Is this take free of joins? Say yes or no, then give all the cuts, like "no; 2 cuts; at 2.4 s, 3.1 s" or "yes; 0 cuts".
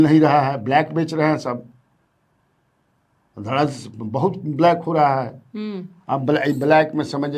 yes; 0 cuts